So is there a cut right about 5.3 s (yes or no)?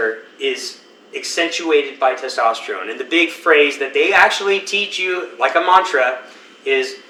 no